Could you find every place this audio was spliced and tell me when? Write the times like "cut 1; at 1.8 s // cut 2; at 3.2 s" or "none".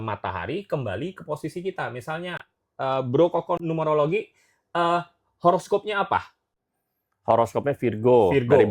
cut 1; at 3.6 s